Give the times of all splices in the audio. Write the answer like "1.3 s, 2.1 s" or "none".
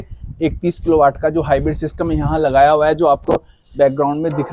none